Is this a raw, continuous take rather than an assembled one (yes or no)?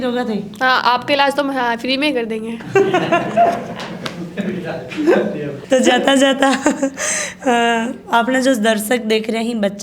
yes